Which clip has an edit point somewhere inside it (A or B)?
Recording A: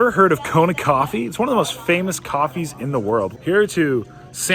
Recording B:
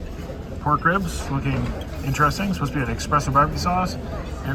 A